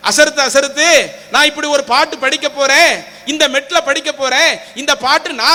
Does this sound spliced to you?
no; 0 cuts

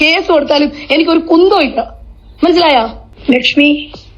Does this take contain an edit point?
yes; 1 cut; at 3.0 s

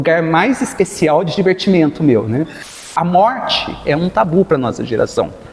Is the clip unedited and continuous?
no; 1 cut; at 2.9 s

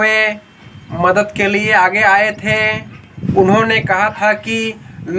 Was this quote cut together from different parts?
yes; 1 cut; at 3.3 s

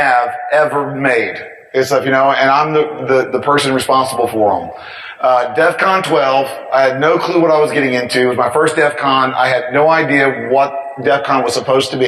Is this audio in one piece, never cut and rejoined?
yes; 0 cuts

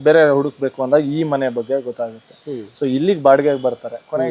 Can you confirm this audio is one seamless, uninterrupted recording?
yes; 0 cuts

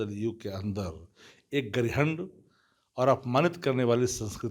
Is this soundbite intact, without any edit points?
yes; 0 cuts

